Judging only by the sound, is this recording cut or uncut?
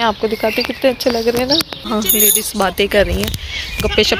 cut